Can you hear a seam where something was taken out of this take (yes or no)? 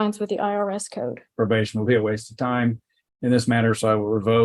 yes